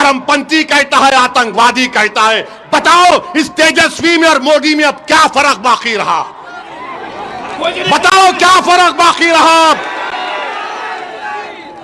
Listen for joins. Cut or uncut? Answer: uncut